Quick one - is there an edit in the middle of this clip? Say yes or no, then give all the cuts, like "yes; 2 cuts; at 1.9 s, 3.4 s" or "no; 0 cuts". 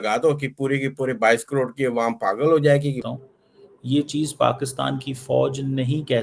yes; 1 cut; at 3.0 s